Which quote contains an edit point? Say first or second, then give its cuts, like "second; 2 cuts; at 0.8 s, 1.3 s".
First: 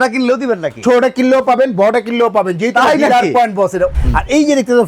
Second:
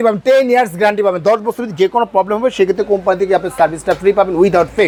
first; 1 cut; at 4.0 s